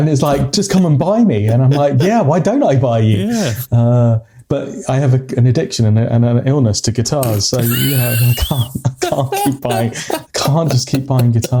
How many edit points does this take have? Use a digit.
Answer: 0